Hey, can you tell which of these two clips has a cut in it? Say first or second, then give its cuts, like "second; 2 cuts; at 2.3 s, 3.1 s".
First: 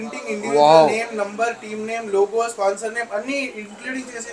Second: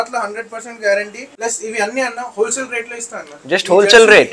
second; 1 cut; at 1.2 s